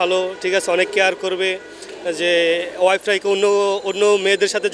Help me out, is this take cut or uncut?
uncut